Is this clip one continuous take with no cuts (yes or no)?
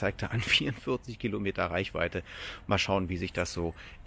yes